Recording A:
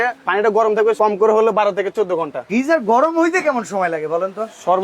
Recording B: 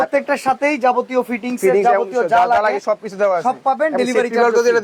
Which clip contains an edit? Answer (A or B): A